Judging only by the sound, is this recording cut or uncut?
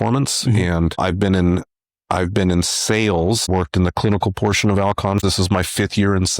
cut